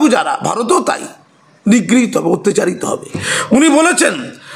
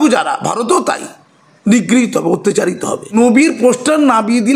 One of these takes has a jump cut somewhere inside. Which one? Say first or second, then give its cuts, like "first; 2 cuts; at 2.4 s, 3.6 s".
first; 1 cut; at 3.0 s